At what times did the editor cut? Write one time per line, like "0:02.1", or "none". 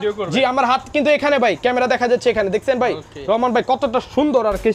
none